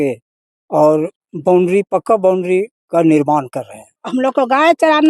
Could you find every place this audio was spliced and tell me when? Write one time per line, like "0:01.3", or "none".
0:04.0